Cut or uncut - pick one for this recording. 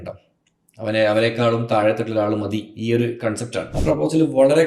cut